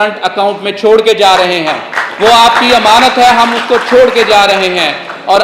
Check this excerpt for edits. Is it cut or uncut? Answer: uncut